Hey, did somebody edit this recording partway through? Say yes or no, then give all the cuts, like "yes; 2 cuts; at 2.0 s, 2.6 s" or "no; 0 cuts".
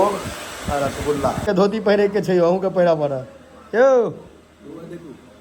yes; 1 cut; at 1.4 s